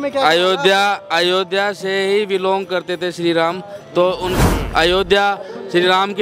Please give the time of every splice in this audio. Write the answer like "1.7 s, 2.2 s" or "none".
4.4 s